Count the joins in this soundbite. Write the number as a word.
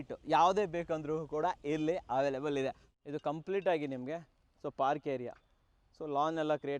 one